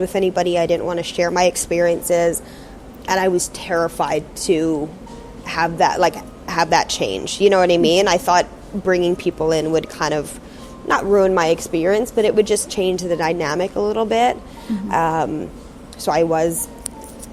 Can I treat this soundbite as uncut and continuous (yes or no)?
yes